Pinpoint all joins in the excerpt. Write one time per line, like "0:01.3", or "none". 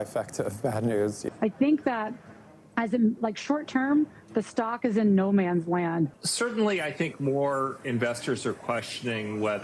0:01.2
0:06.2